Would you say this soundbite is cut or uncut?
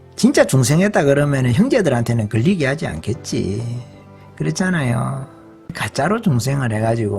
cut